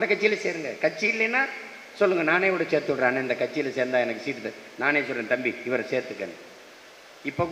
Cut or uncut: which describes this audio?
uncut